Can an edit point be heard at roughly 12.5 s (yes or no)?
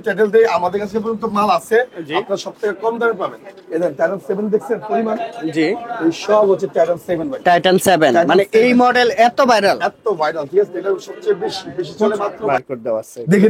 yes